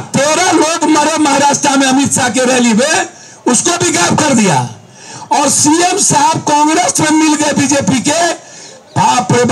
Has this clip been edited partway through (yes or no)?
no